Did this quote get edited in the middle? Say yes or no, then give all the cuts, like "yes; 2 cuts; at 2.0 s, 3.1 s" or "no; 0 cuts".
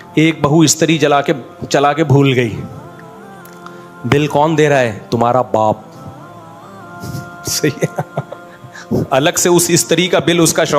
no; 0 cuts